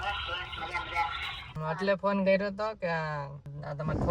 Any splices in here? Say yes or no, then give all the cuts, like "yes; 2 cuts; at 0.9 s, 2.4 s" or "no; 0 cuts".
yes; 1 cut; at 1.5 s